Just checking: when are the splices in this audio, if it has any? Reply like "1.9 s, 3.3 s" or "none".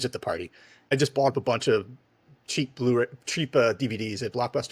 0.9 s

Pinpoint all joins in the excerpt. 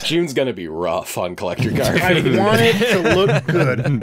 none

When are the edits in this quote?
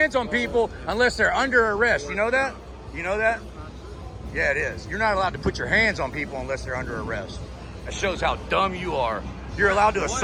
none

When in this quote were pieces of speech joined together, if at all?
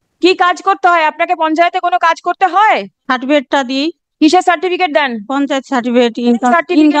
2.9 s

